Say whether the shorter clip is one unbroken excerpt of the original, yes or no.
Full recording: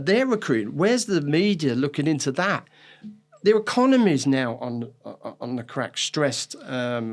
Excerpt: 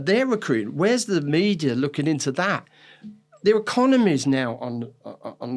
yes